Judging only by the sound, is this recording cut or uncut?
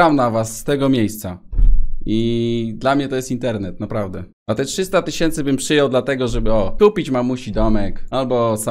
uncut